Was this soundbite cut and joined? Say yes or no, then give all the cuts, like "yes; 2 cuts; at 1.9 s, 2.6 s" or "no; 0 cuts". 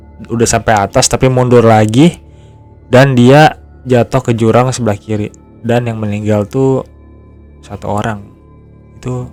no; 0 cuts